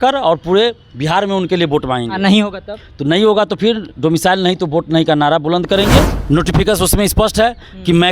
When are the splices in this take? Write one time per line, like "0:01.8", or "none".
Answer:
0:06.2

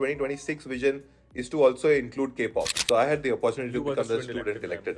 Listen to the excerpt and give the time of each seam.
0:02.8

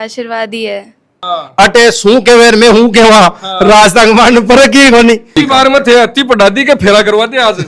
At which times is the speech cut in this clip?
0:01.2
0:05.3

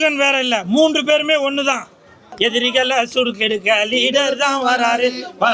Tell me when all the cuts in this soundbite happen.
0:02.3

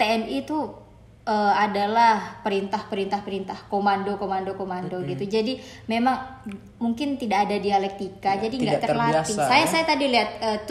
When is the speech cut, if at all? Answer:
none

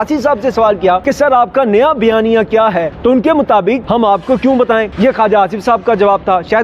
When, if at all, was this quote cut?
0:01.0
0:02.9
0:03.8
0:04.9

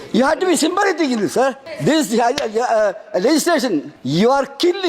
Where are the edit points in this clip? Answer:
0:01.7
0:04.0

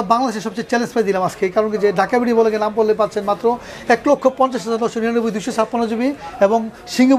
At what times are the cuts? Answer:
none

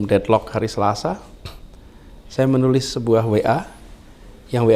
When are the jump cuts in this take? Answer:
none

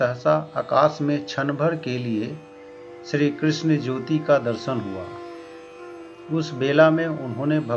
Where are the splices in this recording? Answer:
none

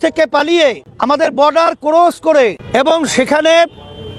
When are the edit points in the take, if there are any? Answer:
0:00.9
0:02.6

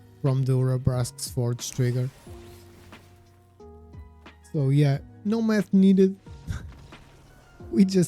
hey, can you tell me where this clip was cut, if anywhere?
0:02.2
0:03.9

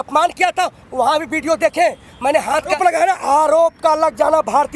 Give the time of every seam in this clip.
0:02.7

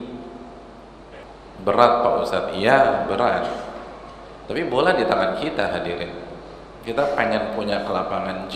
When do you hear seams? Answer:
0:01.2

